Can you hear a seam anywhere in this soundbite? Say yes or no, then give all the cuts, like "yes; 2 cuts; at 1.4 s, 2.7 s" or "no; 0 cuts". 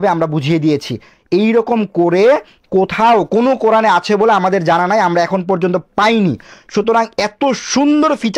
no; 0 cuts